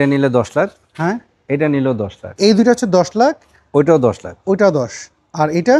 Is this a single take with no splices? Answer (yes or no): no